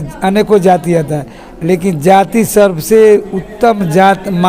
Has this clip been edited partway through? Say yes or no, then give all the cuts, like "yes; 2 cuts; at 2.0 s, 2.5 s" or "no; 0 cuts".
no; 0 cuts